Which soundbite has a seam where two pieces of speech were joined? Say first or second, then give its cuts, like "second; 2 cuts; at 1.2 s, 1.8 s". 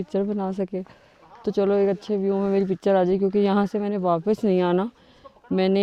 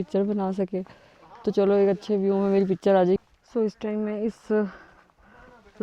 second; 1 cut; at 3.2 s